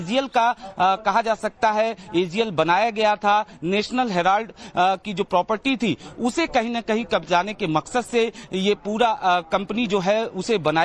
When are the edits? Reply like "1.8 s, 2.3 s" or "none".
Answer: none